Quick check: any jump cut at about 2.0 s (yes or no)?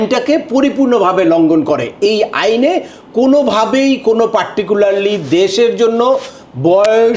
no